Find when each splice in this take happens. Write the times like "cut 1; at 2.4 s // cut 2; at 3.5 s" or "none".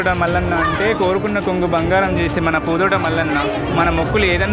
none